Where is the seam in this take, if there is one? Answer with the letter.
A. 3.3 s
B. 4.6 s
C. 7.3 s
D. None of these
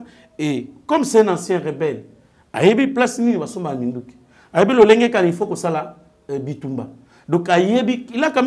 D